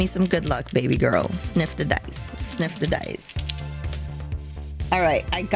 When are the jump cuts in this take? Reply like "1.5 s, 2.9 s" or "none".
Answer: none